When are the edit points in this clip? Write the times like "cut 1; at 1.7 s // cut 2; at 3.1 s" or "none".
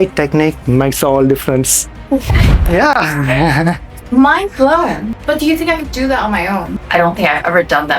cut 1; at 5.1 s // cut 2; at 6.8 s